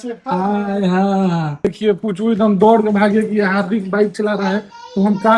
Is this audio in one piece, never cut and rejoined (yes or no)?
no